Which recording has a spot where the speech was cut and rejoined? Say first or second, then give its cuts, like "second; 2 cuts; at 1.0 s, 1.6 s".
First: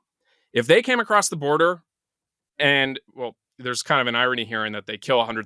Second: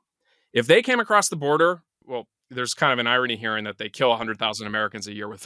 second; 1 cut; at 2.0 s